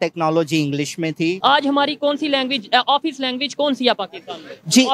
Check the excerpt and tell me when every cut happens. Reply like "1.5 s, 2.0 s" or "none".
1.4 s